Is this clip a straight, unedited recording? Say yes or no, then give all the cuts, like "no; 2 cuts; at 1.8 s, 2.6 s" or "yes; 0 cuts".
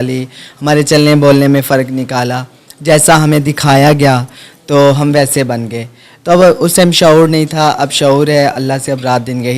yes; 0 cuts